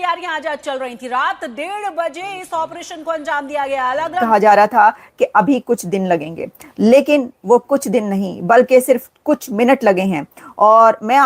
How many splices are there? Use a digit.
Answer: 1